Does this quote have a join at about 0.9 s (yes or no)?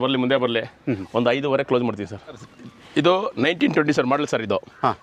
no